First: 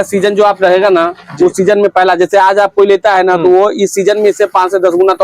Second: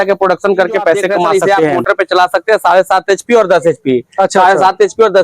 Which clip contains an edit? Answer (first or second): second